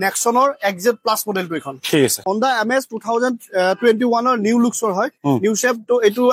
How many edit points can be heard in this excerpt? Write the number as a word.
one